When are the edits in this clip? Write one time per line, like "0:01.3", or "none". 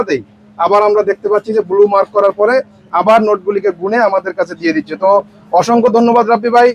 none